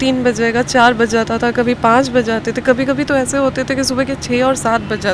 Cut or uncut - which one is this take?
uncut